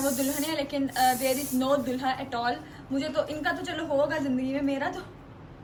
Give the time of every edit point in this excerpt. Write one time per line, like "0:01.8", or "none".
none